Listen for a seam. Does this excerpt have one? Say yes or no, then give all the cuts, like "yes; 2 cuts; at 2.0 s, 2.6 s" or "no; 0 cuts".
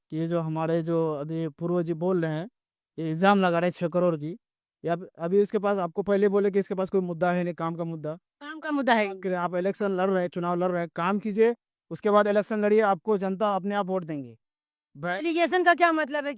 no; 0 cuts